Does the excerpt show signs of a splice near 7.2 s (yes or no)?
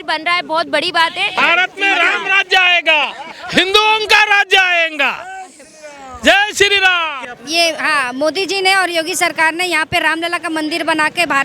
yes